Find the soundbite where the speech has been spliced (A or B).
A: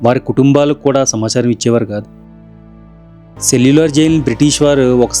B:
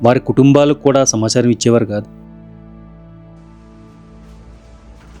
A